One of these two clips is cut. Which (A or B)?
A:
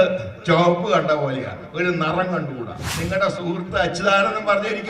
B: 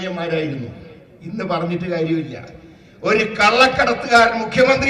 A